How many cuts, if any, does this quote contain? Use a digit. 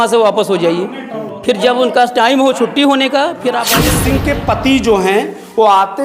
1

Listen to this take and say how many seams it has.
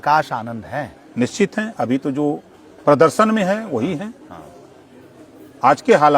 0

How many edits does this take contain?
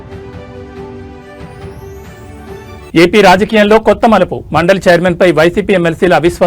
1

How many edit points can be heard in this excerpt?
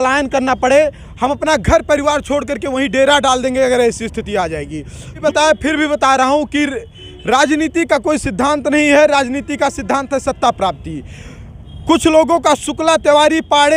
1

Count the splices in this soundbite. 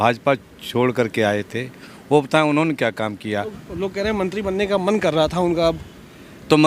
1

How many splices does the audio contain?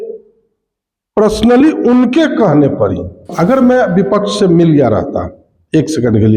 1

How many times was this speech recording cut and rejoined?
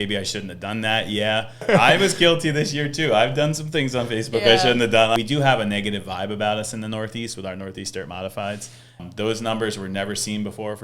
3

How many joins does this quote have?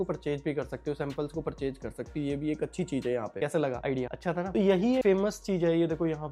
0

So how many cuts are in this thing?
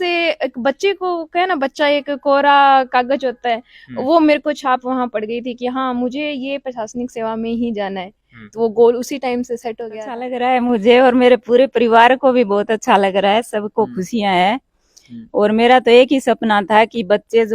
1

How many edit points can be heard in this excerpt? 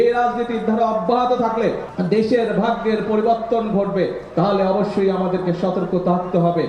1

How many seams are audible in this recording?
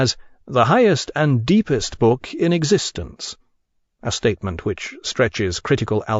0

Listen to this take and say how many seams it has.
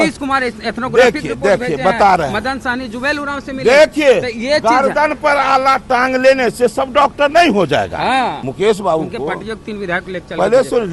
1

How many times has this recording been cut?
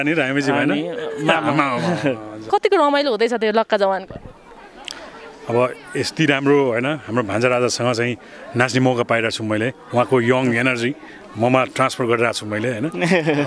0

